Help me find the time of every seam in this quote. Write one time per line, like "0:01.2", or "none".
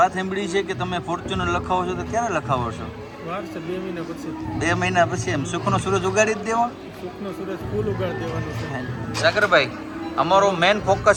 none